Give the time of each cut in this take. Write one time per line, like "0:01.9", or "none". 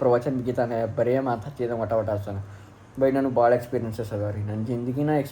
none